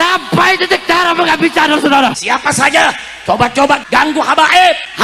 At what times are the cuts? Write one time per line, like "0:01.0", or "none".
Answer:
0:02.2